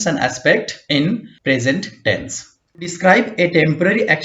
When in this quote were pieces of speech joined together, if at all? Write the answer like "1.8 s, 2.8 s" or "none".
1.0 s, 2.9 s